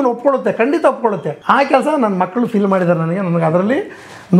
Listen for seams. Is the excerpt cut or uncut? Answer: cut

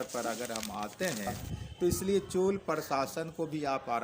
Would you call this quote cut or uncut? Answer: cut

